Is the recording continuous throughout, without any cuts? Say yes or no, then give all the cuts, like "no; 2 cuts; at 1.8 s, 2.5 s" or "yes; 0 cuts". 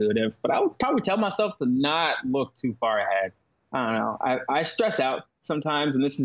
yes; 0 cuts